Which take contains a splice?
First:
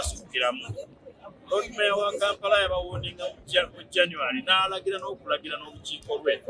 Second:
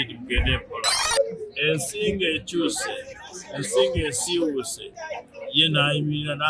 second; 1 cut; at 1.0 s

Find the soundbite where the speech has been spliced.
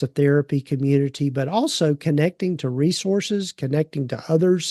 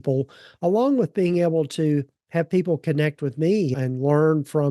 second; 1 cut; at 3.7 s

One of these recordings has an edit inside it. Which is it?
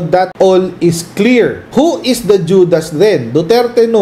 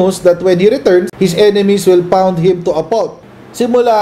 second; 1 cut; at 3.1 s

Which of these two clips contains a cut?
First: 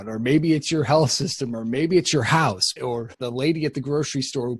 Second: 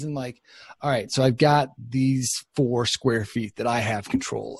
first; 1 cut; at 2.8 s

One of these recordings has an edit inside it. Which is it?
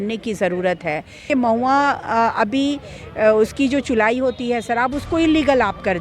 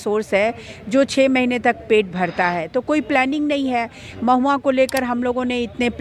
first; 1 cut; at 1.1 s

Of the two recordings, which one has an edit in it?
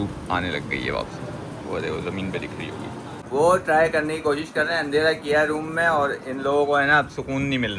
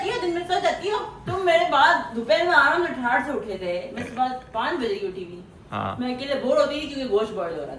first; 1 cut; at 3.2 s

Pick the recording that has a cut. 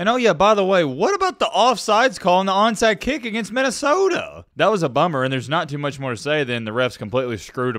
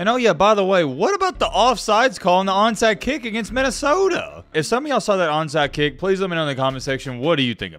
second; 1 cut; at 4.4 s

